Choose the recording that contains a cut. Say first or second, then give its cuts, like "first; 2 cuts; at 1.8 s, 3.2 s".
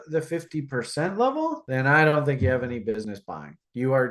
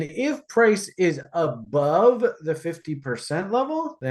first; 1 cut; at 3.1 s